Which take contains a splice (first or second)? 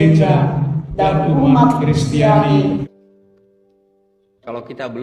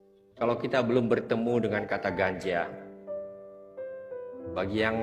first